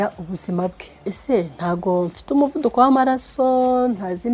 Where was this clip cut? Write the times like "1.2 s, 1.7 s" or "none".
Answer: 1.1 s